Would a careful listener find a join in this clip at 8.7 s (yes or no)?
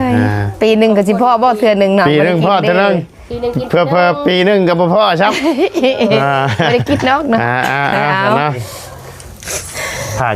yes